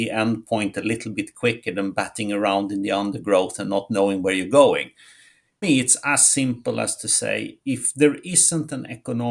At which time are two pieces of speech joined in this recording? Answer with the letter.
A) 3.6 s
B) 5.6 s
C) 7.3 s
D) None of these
B